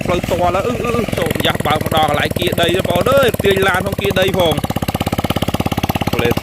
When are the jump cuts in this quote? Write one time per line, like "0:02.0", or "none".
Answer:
0:01.1